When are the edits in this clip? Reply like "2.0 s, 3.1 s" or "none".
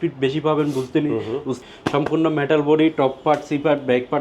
1.5 s